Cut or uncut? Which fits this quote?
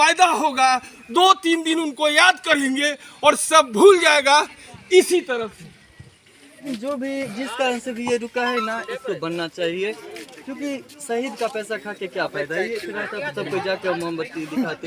cut